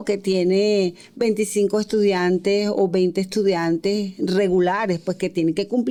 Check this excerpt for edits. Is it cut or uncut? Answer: uncut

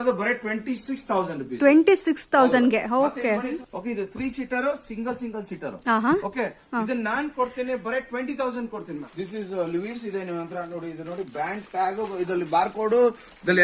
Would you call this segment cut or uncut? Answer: cut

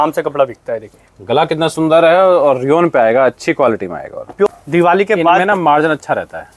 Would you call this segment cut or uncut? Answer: cut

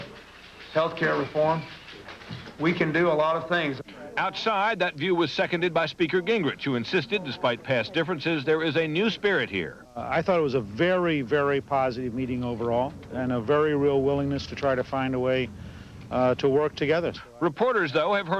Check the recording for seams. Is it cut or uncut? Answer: uncut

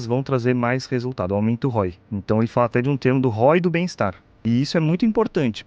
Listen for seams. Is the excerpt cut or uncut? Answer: cut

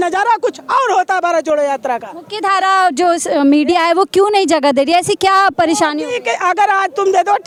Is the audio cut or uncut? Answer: uncut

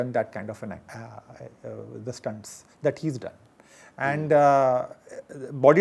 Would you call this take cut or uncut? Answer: uncut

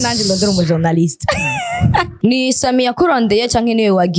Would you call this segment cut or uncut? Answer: cut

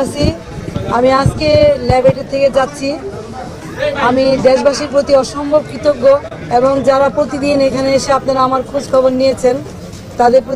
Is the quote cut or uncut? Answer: uncut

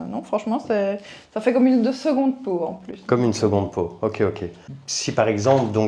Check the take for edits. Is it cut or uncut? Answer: uncut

